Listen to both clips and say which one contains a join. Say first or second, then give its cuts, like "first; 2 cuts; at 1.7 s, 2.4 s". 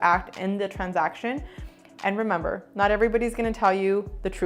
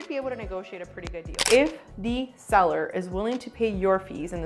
second; 1 cut; at 1.3 s